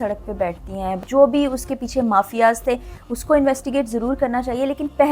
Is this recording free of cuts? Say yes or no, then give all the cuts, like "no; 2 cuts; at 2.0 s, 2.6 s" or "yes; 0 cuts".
no; 1 cut; at 1.0 s